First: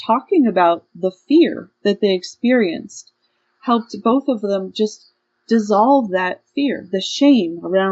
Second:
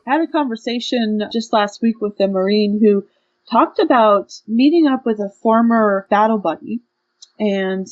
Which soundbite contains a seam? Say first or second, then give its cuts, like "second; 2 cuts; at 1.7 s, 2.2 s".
second; 3 cuts; at 1.3 s, 4.4 s, 6.0 s